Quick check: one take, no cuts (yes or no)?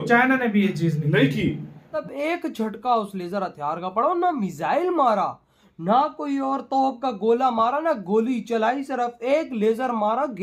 no